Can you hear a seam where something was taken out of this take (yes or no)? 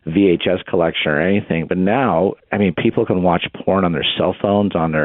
yes